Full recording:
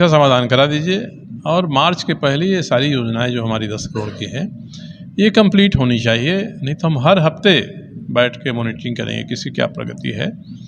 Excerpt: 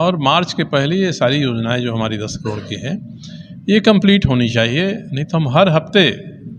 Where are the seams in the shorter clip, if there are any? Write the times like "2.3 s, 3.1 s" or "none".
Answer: none